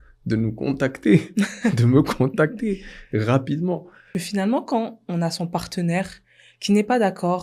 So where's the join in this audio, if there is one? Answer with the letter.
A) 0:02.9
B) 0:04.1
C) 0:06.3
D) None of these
B